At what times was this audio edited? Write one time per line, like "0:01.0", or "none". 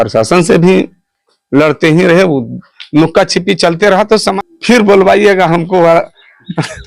0:04.3